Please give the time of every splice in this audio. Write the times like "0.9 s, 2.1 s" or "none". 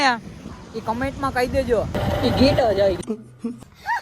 2.0 s, 3.0 s